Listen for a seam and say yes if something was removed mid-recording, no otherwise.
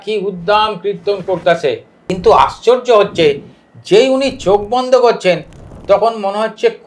yes